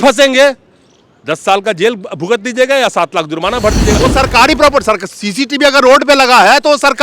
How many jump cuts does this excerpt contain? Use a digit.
1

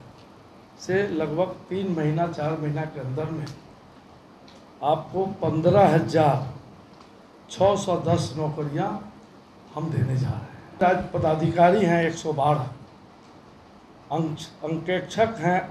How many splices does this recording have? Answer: 1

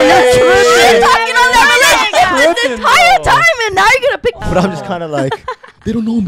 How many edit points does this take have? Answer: 1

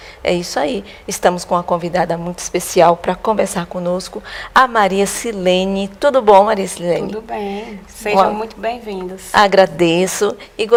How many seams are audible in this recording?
0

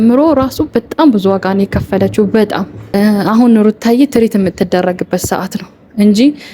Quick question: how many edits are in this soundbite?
1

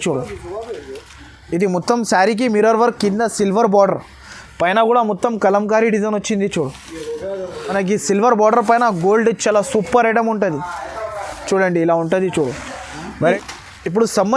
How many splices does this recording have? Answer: 2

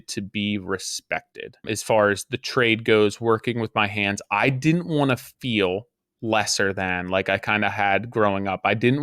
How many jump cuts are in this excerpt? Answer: 1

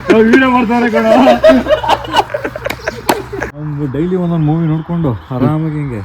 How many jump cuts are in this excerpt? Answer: 1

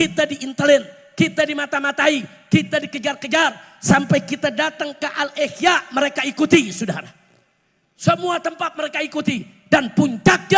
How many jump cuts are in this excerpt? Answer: 0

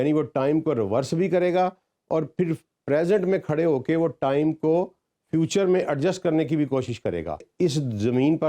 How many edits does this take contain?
1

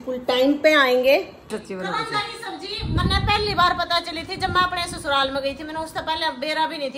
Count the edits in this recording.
1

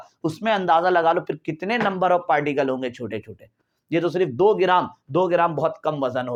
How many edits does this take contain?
0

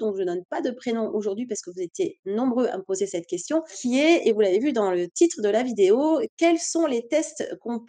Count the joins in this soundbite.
1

